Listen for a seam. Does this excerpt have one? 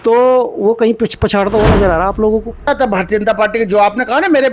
yes; 1 cut; at 2.6 s

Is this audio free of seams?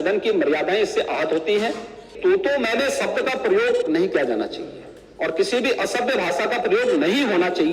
no; 1 cut; at 2.1 s

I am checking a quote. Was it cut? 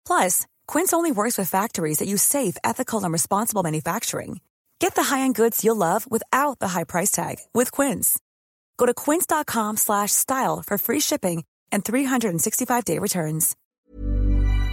yes; 1 cut; at 13.6 s

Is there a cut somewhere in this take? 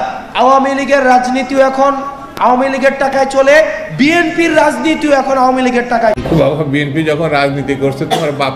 yes; 1 cut; at 6.2 s

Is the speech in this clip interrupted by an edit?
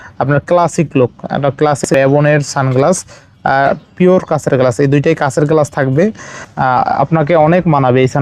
yes; 2 cuts; at 1.9 s, 6.4 s

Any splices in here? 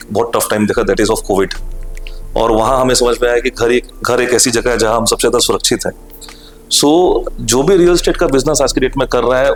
no; 0 cuts

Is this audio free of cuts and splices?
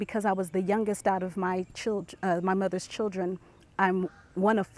yes; 0 cuts

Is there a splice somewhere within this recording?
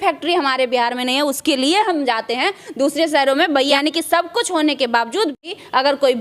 yes; 1 cut; at 3.7 s

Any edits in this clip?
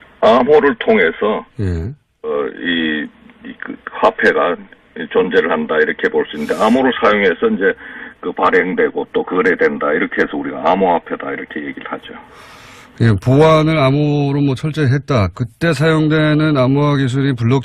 yes; 1 cut; at 5.1 s

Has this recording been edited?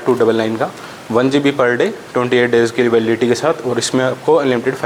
no; 0 cuts

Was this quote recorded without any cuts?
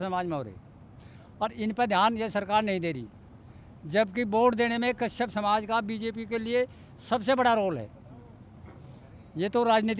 yes; 0 cuts

